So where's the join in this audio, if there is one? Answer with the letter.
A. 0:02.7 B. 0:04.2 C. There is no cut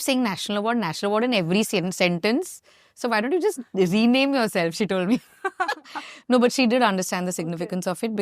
C